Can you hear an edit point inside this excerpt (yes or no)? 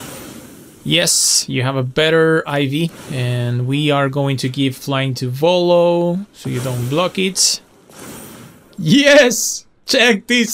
no